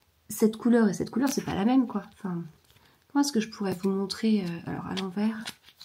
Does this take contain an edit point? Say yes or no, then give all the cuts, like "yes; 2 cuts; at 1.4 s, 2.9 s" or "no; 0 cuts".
no; 0 cuts